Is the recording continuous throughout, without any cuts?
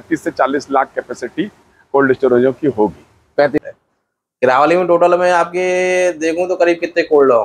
no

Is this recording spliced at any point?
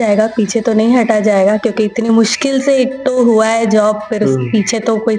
no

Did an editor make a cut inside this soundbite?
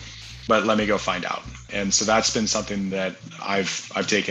yes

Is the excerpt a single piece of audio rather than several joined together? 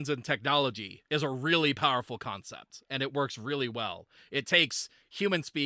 no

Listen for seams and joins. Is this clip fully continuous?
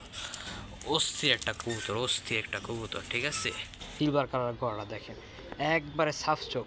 no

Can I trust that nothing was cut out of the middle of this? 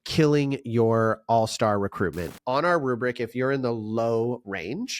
no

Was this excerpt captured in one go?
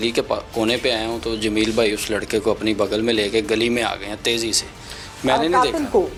yes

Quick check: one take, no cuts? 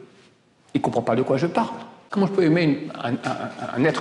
no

